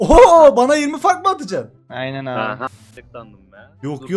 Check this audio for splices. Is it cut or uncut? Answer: cut